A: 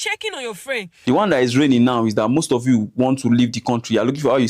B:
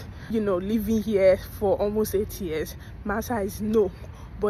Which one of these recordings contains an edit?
A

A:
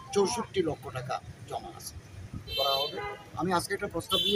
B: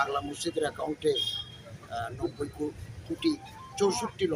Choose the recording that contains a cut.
A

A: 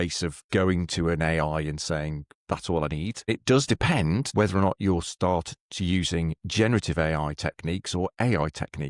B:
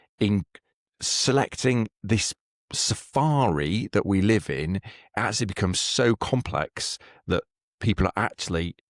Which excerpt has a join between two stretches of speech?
A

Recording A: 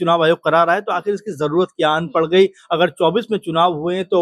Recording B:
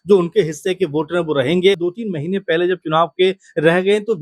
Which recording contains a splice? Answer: B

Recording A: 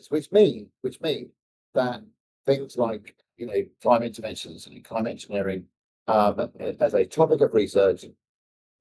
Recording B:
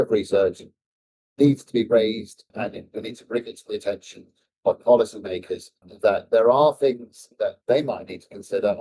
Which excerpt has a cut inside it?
B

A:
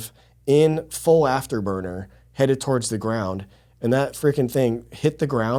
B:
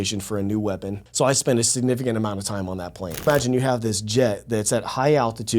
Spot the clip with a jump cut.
B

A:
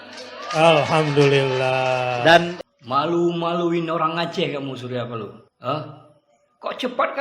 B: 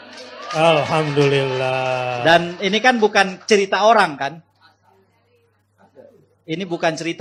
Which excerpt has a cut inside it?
A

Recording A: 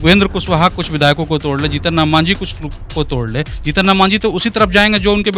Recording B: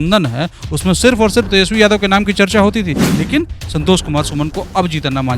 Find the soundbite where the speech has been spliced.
B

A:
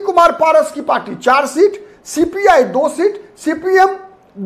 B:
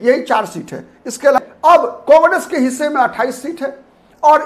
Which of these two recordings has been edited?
B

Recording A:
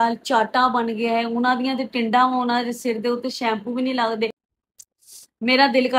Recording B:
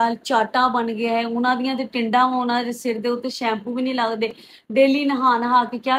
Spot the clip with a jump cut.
A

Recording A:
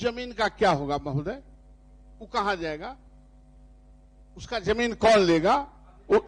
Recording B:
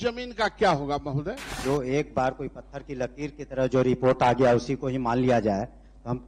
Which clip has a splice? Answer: B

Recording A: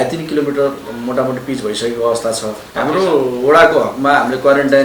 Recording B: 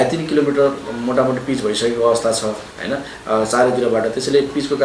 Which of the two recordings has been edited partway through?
A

